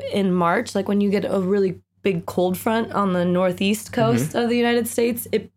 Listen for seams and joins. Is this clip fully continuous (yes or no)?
yes